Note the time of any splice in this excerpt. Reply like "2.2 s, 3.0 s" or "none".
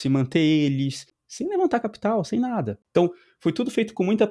1.1 s, 2.8 s